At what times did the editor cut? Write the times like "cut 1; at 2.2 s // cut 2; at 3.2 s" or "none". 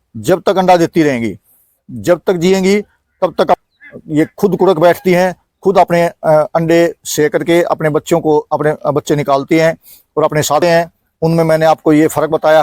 cut 1; at 3.6 s // cut 2; at 10.6 s

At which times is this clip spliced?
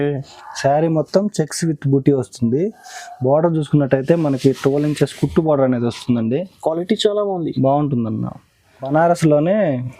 cut 1; at 8.9 s

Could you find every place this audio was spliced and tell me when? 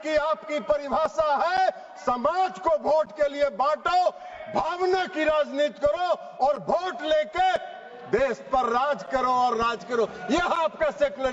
none

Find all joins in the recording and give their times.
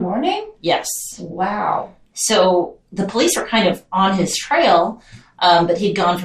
none

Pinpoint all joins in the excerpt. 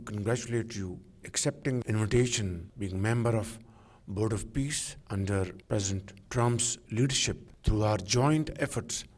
cut 1; at 1.2 s // cut 2; at 2.7 s // cut 3; at 4.9 s // cut 4; at 7.5 s

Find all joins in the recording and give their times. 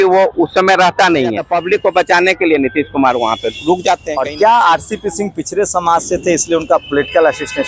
cut 1; at 1.4 s // cut 2; at 4.1 s

